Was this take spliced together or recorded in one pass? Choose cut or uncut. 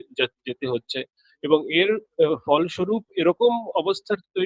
uncut